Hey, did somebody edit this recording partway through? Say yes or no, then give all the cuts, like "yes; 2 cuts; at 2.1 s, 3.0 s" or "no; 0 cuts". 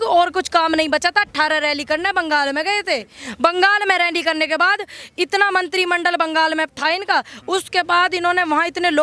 no; 0 cuts